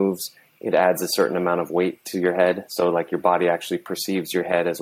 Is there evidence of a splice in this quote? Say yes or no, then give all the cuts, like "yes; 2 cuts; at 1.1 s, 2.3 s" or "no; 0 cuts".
no; 0 cuts